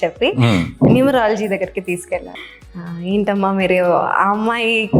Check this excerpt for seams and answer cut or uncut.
cut